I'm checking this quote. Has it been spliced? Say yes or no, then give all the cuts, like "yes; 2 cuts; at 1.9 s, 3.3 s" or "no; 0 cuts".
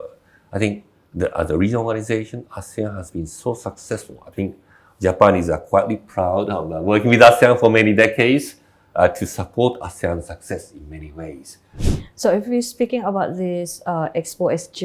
yes; 1 cut; at 11.8 s